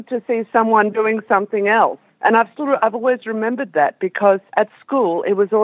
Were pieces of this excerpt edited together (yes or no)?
yes